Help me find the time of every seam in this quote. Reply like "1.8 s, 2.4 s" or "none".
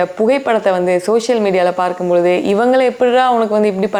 none